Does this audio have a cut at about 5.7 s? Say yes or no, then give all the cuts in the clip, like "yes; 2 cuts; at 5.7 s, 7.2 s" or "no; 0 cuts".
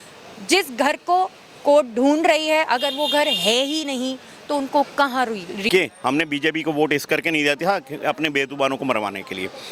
yes; 1 cut; at 5.7 s